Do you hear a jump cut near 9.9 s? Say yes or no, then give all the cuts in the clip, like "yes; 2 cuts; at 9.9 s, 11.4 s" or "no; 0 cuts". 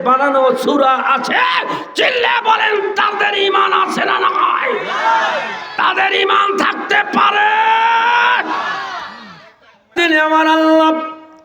yes; 1 cut; at 9.9 s